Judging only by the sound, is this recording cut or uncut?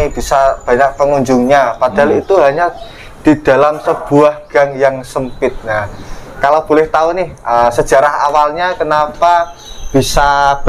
uncut